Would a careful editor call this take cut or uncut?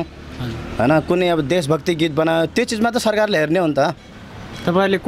uncut